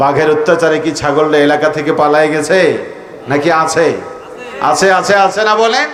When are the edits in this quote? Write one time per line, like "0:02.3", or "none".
none